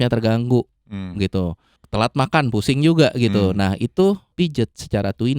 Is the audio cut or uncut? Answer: cut